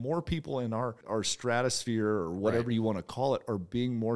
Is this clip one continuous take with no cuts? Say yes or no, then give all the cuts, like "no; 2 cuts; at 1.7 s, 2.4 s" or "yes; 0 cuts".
no; 1 cut; at 1.0 s